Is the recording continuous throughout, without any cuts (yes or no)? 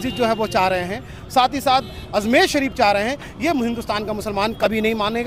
yes